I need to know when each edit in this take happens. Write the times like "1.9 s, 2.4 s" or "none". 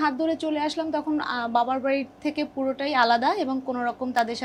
none